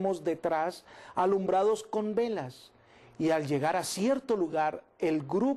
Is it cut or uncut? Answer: uncut